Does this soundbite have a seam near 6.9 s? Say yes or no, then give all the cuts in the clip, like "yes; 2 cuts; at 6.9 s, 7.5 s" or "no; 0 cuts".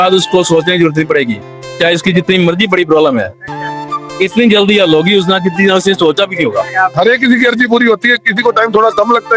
yes; 1 cut; at 6.9 s